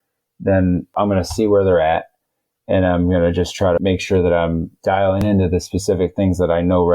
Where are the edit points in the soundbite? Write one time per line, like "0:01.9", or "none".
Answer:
0:00.9
0:03.8
0:05.2